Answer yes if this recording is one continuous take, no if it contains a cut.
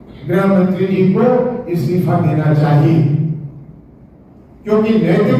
yes